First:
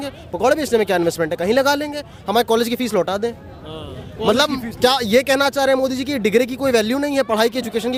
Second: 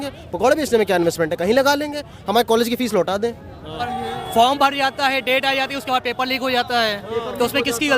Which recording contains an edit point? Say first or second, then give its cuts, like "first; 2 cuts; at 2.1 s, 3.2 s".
second; 1 cut; at 3.8 s